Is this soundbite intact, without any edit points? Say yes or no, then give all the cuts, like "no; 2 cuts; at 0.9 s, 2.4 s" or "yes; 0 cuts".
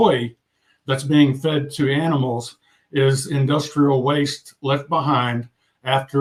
yes; 0 cuts